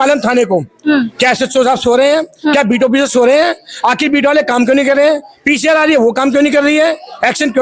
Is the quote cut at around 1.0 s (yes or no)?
no